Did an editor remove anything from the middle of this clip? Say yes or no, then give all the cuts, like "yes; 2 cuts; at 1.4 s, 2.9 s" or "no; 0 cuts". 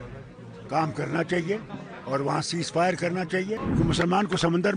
yes; 1 cut; at 3.6 s